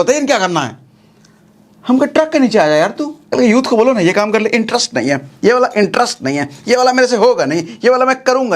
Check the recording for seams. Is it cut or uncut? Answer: cut